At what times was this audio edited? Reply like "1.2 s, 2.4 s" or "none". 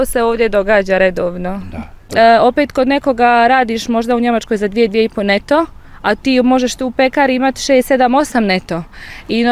2.1 s